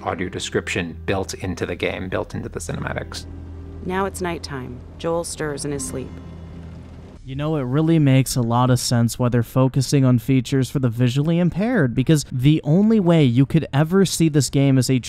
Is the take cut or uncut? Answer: cut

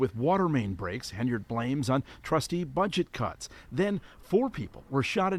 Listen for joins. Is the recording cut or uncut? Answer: uncut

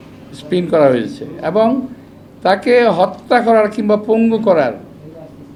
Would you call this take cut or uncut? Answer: uncut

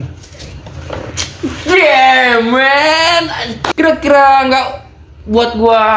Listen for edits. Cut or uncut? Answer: cut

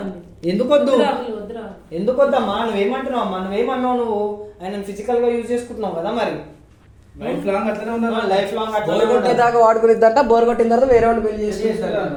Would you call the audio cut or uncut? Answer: uncut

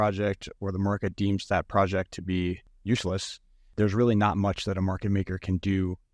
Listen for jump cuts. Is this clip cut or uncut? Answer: cut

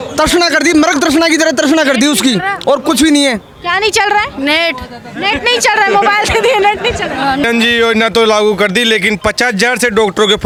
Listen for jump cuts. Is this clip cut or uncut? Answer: uncut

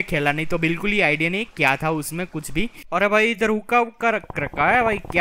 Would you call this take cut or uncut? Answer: cut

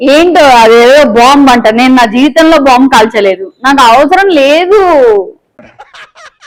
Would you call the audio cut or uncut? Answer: uncut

